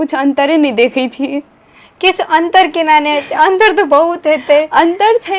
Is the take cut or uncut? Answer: uncut